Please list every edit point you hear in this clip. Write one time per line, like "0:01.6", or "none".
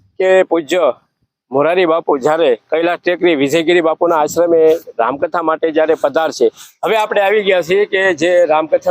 0:06.7